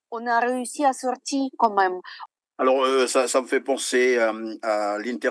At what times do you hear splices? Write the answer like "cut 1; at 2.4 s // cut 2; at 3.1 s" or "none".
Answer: cut 1; at 2.1 s